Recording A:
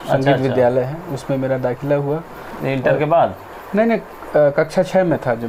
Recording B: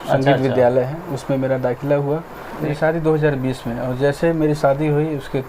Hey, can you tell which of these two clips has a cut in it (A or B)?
B